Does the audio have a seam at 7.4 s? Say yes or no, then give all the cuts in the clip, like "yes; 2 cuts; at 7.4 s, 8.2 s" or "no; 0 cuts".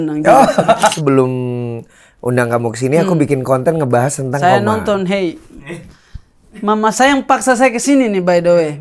no; 1 cut; at 1.0 s